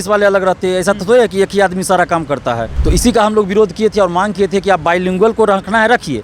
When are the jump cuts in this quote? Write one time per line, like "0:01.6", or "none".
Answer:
0:02.7